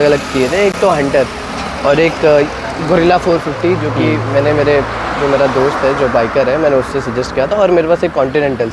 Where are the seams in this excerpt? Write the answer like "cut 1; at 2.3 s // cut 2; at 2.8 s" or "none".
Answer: none